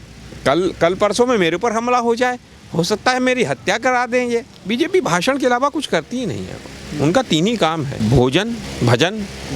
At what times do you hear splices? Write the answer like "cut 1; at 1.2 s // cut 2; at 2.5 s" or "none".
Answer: cut 1; at 4.6 s // cut 2; at 7.9 s // cut 3; at 8.7 s